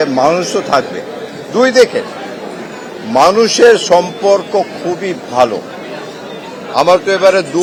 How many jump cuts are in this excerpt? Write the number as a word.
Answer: zero